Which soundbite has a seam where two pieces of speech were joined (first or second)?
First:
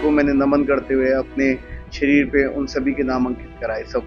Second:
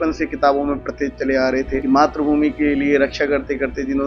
second